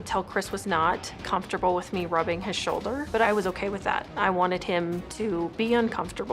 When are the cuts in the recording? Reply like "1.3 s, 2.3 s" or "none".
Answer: 3.2 s